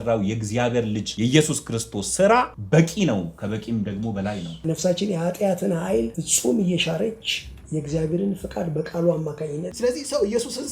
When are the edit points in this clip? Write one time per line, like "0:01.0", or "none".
0:01.1
0:02.6
0:04.6
0:06.2
0:09.7